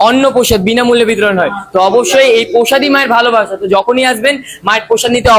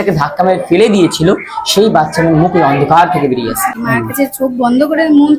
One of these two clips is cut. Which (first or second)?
second